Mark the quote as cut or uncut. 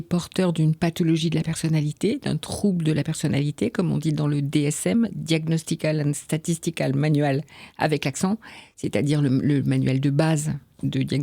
uncut